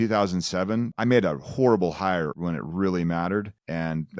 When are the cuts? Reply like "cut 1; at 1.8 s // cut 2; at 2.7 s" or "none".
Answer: cut 1; at 0.9 s // cut 2; at 2.3 s

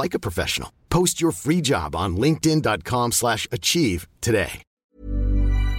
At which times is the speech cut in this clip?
cut 1; at 4.7 s

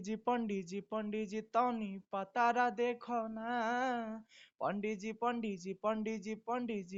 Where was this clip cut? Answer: none

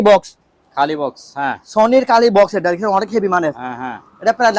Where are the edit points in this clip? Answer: none

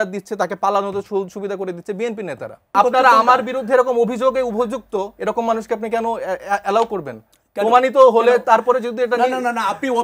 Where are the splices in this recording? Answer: cut 1; at 2.7 s

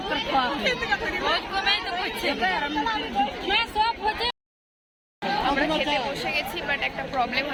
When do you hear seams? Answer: none

